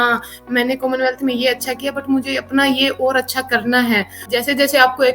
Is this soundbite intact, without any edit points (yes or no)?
no